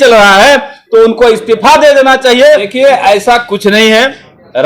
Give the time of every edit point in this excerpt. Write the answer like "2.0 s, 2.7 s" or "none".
2.7 s